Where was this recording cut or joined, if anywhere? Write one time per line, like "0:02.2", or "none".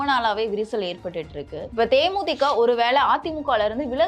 0:01.6